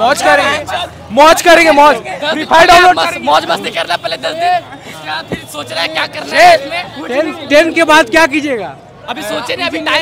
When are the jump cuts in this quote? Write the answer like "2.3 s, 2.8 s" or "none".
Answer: none